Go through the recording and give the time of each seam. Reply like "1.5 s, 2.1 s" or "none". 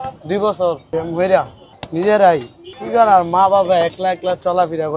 0.8 s, 1.6 s